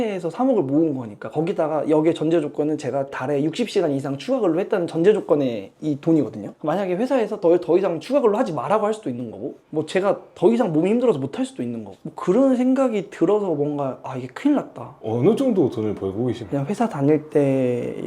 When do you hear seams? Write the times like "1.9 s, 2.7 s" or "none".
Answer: 15.0 s, 16.4 s